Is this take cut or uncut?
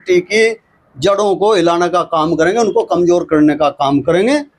uncut